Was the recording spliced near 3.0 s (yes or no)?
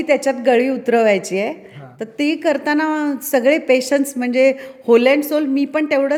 no